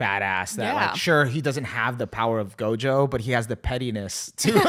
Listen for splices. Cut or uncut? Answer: uncut